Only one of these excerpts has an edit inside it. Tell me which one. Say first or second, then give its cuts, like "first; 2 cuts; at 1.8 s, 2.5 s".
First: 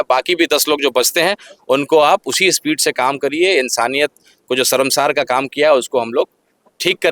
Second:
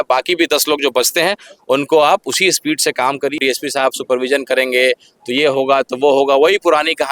second; 1 cut; at 3.4 s